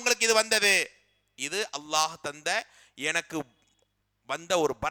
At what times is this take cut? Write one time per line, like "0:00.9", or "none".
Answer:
none